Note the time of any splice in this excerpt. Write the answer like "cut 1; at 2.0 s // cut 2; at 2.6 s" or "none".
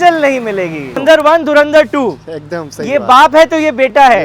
cut 1; at 1.0 s